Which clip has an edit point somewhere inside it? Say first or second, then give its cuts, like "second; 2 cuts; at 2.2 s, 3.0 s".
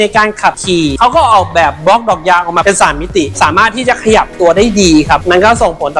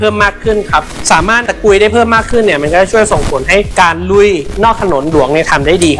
first; 2 cuts; at 0.9 s, 3.3 s